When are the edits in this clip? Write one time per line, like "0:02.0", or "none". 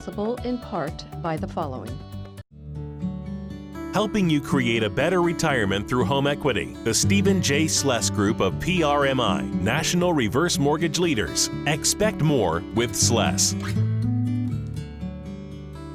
none